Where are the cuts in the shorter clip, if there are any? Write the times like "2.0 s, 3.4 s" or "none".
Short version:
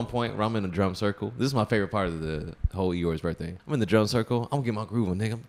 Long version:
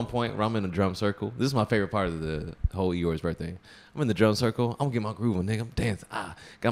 3.5 s